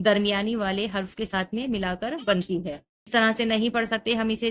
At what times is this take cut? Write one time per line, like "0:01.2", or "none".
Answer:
0:03.1